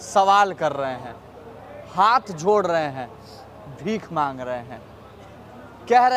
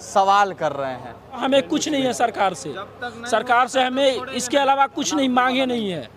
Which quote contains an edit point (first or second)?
second